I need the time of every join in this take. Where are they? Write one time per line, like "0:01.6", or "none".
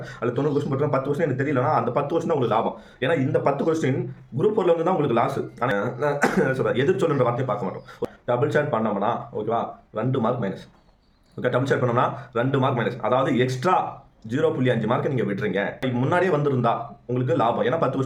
none